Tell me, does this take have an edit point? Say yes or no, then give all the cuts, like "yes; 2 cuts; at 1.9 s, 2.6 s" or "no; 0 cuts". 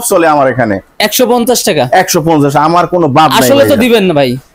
no; 0 cuts